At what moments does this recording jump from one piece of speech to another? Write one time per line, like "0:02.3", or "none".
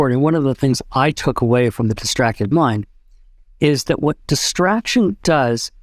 none